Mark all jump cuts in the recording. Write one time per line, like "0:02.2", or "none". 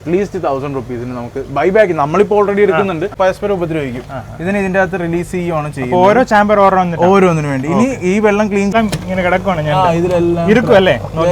0:03.1
0:08.7

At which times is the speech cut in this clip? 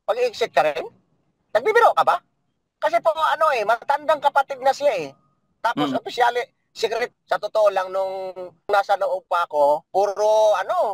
0:07.1
0:08.7
0:09.9

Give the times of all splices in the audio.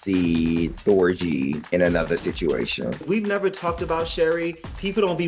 0:01.6
0:03.0

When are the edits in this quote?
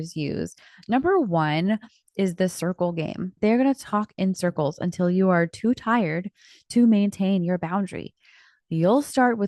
0:03.4

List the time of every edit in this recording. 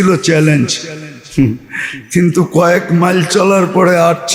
none

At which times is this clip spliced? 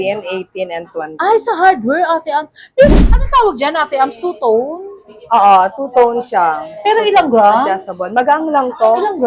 0:02.9

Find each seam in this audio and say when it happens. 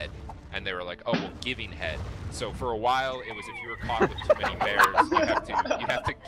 none

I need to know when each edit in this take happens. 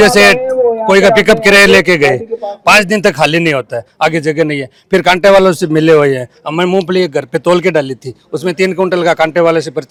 none

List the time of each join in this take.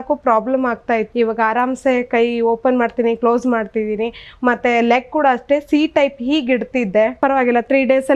0:07.1

